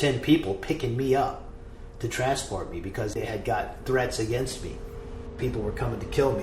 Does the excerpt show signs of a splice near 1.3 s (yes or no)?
no